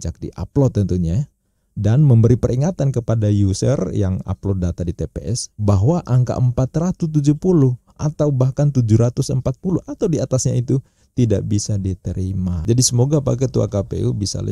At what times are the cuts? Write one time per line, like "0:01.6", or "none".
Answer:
0:12.6